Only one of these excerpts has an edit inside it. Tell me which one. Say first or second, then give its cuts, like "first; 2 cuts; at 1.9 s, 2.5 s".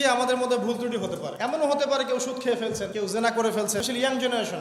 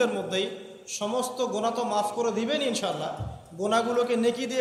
first; 3 cuts; at 1.3 s, 2.9 s, 3.8 s